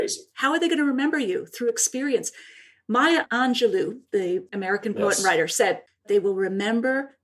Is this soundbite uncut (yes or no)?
no